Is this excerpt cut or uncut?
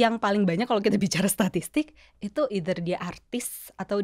uncut